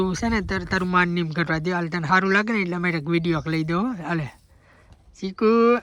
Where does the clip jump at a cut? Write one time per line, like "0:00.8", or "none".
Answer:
none